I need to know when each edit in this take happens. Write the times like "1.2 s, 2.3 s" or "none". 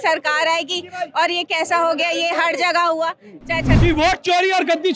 3.7 s